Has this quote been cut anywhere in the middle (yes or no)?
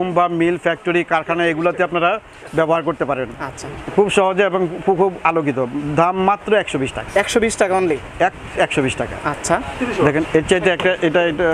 no